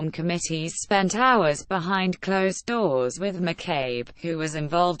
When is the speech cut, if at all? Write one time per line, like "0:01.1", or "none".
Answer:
0:03.4